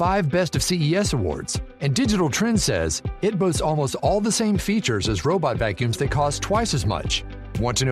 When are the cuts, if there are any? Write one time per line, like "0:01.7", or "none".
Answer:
none